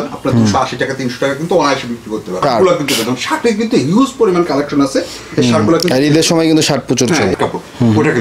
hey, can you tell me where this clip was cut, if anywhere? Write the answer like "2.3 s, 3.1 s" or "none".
2.3 s, 7.3 s